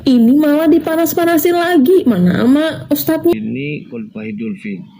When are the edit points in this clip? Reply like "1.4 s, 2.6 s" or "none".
3.2 s